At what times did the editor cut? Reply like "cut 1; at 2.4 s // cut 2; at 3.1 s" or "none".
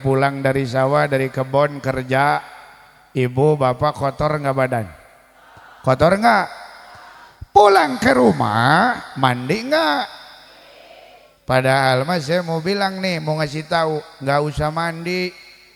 none